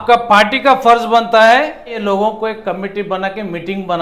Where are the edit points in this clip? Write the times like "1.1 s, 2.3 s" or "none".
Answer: 2.0 s